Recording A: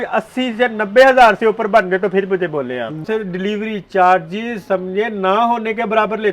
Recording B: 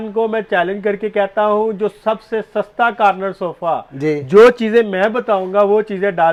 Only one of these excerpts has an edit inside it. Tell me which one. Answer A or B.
A